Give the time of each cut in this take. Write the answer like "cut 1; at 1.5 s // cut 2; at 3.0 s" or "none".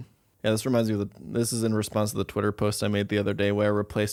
none